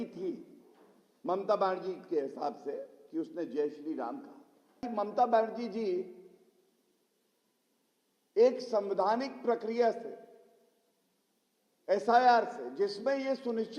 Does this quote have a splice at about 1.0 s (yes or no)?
no